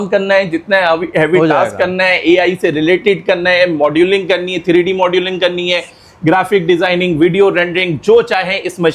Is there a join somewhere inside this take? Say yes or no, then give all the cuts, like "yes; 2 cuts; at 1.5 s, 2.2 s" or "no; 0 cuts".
no; 0 cuts